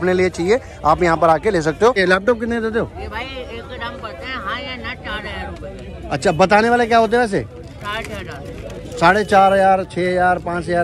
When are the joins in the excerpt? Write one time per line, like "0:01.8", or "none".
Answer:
none